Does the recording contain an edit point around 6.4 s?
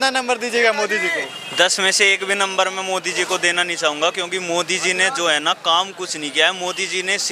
no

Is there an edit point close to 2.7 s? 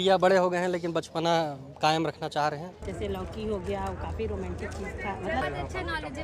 yes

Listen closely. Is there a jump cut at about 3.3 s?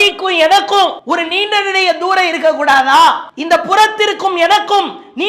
yes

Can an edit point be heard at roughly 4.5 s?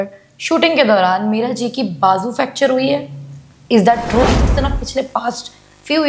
yes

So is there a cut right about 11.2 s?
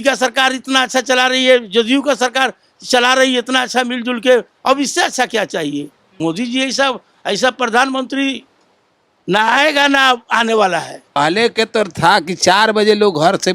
yes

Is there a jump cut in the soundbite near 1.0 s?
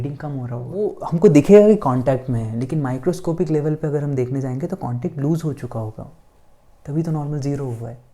yes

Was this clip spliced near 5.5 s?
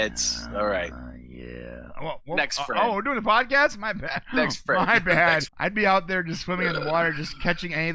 yes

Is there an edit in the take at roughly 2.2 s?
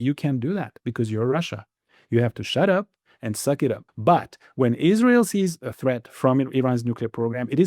no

